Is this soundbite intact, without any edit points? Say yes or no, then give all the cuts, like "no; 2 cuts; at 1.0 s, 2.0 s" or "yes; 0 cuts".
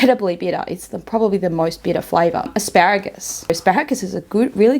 no; 2 cuts; at 2.5 s, 3.5 s